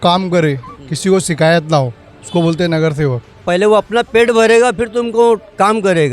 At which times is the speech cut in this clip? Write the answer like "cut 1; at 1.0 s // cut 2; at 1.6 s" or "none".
cut 1; at 3.4 s